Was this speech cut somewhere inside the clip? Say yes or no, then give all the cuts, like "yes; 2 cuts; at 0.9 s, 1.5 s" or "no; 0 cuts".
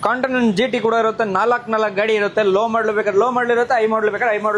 no; 0 cuts